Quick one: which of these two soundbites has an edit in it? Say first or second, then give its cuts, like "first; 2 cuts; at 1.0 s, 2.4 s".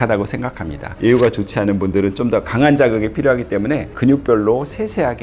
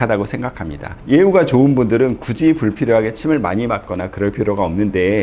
first; 2 cuts; at 1.0 s, 3.9 s